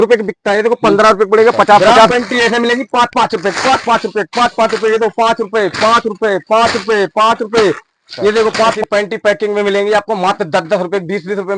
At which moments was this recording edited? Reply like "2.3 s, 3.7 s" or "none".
2.1 s, 8.8 s